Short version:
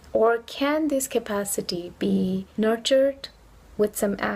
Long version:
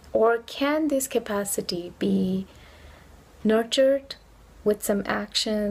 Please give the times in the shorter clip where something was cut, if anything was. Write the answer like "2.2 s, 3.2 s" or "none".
2.5 s